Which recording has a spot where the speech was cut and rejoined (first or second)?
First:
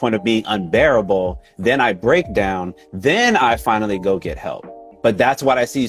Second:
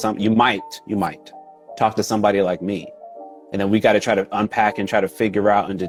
first